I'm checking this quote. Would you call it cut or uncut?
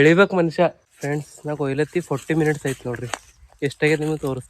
cut